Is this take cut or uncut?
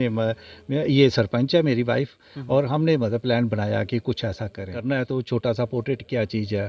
cut